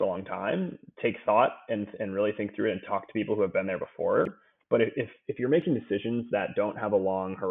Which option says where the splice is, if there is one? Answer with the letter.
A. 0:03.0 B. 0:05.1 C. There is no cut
C